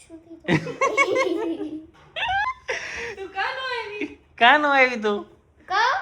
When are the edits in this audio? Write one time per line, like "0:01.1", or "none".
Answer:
0:02.5